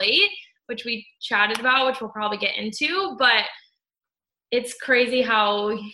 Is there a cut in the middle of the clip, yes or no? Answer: no